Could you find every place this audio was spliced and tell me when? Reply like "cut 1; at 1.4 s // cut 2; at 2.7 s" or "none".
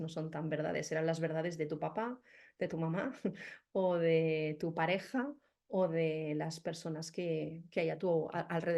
none